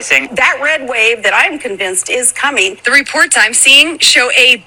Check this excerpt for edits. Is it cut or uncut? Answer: uncut